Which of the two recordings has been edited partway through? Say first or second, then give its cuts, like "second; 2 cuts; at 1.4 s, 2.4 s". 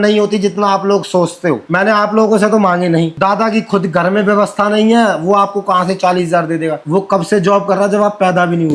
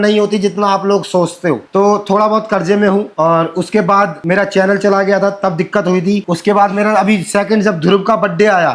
first; 2 cuts; at 1.6 s, 3.1 s